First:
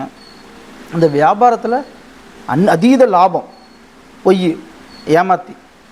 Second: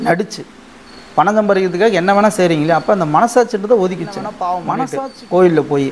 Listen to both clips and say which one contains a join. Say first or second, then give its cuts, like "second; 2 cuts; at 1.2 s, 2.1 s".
second; 1 cut; at 4.7 s